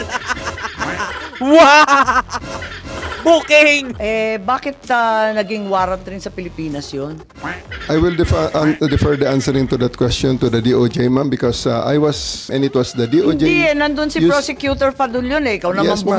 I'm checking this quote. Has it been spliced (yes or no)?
yes